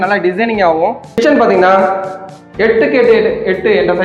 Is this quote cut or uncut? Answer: cut